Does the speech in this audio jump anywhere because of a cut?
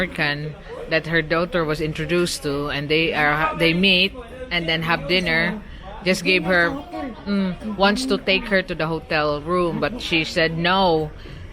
no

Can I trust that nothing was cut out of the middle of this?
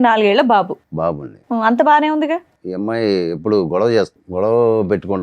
no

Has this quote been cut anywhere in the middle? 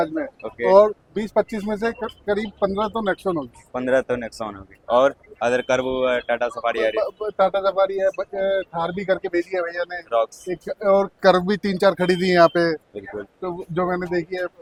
no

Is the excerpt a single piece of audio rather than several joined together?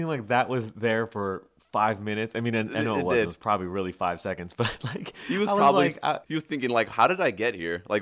no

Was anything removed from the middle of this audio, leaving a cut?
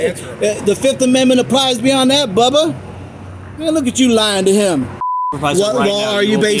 yes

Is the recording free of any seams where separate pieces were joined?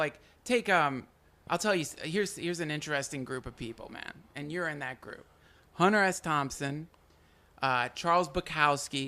no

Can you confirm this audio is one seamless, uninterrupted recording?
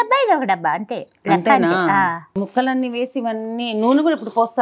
no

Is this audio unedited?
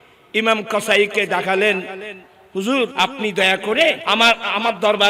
no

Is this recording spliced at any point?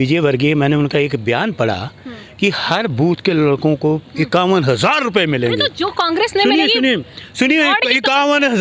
no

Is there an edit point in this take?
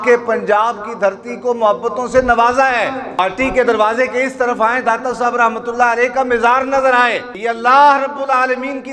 yes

